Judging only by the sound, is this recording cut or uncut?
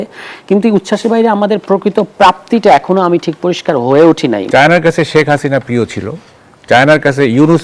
cut